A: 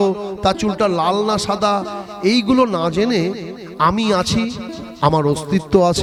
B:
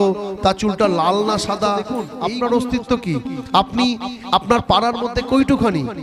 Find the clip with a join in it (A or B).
B